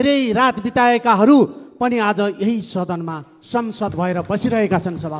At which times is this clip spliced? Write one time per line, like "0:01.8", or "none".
none